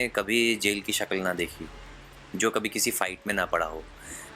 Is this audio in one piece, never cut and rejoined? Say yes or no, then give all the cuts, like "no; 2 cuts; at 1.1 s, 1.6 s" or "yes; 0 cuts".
yes; 0 cuts